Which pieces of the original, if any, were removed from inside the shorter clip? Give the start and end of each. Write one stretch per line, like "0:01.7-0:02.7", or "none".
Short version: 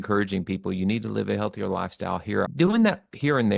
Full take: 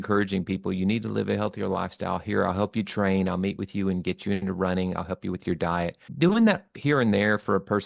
0:02.5-0:06.1